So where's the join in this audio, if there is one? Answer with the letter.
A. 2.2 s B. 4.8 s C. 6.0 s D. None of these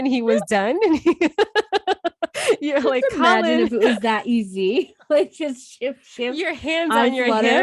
D